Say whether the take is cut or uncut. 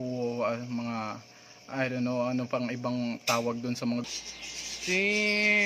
cut